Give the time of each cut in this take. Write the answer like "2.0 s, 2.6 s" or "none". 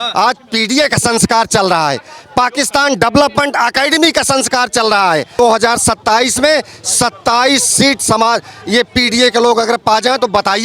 5.4 s